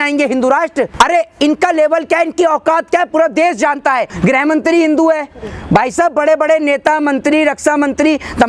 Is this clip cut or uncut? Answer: cut